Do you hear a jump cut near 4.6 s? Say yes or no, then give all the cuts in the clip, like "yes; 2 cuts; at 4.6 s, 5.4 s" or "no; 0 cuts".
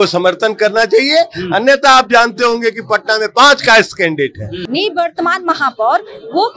yes; 1 cut; at 4.6 s